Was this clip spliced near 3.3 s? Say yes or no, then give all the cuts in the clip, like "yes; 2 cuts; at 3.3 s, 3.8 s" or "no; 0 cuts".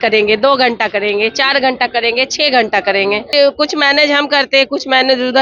yes; 1 cut; at 3.3 s